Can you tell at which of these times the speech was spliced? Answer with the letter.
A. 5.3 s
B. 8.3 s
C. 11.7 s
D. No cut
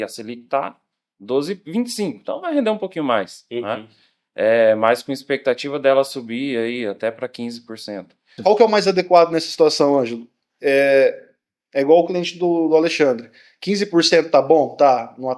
B